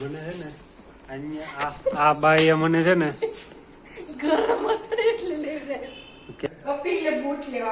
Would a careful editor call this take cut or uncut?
cut